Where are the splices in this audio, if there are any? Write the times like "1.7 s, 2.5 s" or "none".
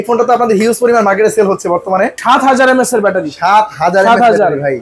2.2 s